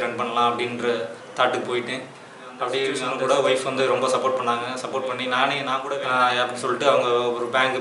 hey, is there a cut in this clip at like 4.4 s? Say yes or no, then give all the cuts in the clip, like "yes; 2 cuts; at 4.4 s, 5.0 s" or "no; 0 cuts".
no; 2 cuts; at 3.1 s, 5.8 s